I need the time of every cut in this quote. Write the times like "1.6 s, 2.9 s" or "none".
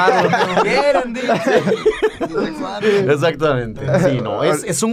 none

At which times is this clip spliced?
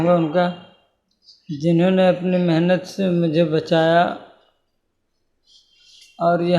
none

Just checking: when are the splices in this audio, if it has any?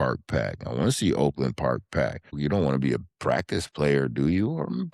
2.3 s

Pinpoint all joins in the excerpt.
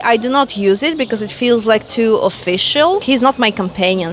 3.0 s

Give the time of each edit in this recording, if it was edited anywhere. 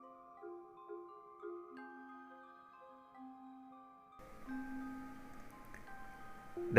5.1 s

